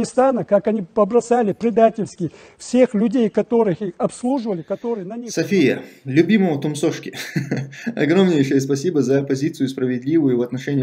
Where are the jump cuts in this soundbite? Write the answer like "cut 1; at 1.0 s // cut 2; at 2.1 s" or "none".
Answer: cut 1; at 5.2 s